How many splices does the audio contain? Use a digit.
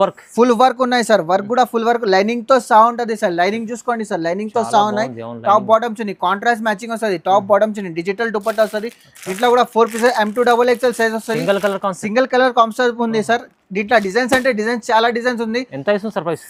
0